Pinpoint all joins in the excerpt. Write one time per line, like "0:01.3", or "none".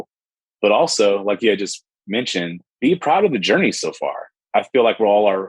0:04.4